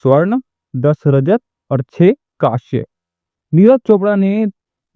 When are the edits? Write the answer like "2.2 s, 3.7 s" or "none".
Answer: 2.9 s